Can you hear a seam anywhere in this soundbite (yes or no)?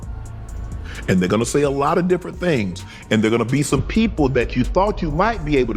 no